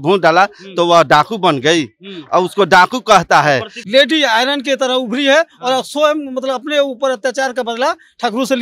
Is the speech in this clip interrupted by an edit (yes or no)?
yes